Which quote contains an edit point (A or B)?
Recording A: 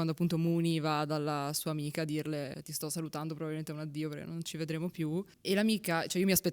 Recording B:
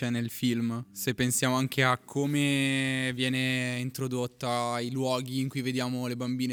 A